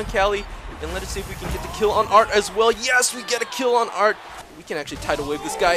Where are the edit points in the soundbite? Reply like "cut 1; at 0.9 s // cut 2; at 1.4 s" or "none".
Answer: cut 1; at 4.3 s